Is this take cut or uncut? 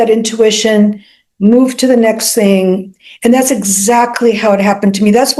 uncut